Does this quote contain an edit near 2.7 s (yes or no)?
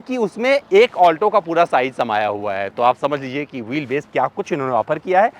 no